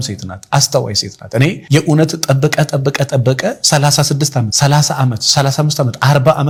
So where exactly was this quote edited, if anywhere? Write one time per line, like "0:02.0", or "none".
none